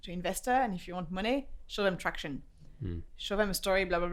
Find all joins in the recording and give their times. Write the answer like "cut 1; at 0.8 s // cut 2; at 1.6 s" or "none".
none